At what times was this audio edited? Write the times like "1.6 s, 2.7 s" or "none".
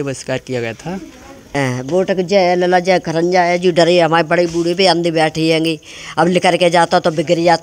1.5 s